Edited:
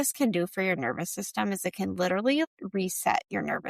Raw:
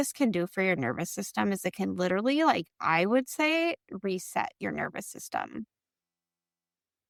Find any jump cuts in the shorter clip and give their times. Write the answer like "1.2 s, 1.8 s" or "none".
2.4 s